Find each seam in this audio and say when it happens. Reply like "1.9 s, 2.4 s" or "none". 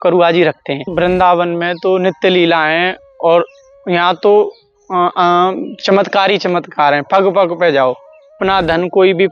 0.9 s, 8.4 s